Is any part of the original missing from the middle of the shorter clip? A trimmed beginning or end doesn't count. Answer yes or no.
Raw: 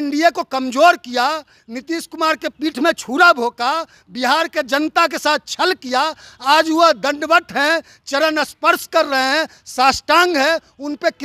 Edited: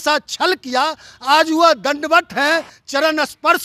no